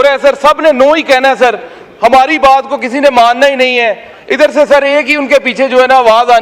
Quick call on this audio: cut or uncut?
uncut